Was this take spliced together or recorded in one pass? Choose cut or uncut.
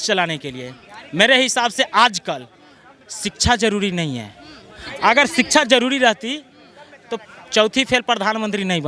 uncut